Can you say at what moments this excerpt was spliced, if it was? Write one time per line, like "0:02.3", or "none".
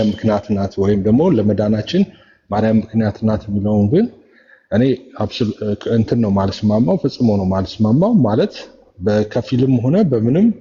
none

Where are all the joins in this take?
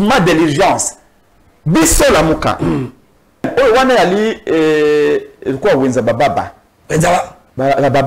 0:03.5

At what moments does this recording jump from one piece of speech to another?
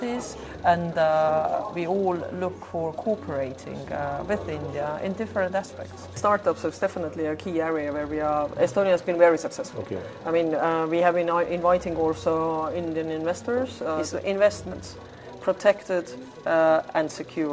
0:06.2
0:14.0

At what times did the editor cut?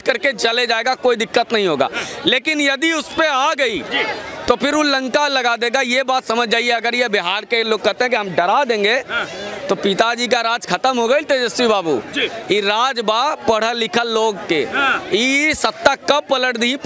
none

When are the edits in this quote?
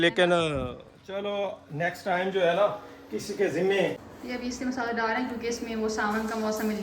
0:04.0

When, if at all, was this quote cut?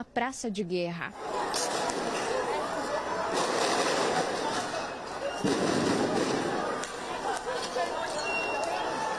none

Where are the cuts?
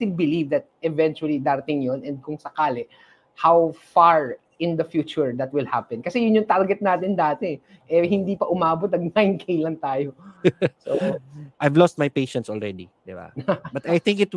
0:11.4

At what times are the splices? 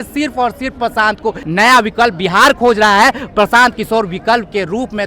0:01.4

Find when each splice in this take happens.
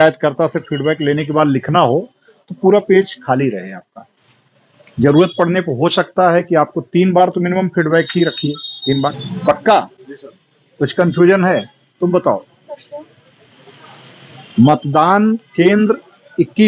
0:09.2

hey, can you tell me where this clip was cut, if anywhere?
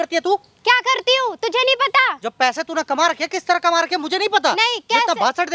none

